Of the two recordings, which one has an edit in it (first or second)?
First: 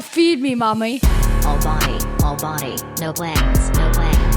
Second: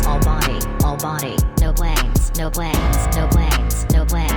first